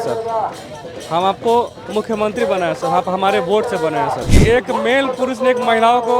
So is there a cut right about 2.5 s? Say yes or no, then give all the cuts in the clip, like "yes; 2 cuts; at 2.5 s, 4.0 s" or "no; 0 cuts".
no; 1 cut; at 4.3 s